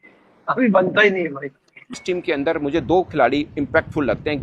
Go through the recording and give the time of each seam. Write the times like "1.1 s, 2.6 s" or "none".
2.0 s